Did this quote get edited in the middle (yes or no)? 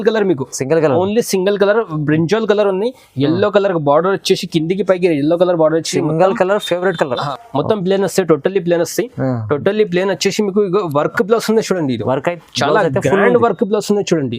yes